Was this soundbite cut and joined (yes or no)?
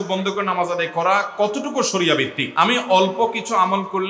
yes